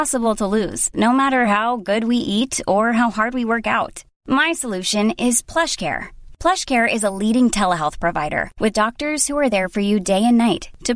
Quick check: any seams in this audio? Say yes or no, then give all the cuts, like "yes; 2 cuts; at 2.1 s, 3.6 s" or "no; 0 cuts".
no; 0 cuts